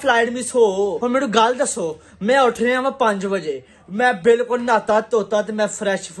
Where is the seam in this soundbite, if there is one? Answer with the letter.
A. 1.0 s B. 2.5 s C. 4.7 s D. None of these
A